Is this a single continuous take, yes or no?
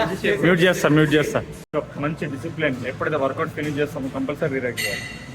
no